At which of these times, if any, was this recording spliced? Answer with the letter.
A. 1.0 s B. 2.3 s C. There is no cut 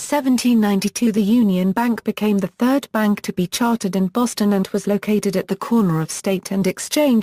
B